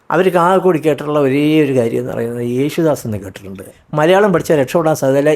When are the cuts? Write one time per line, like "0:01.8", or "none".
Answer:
0:03.8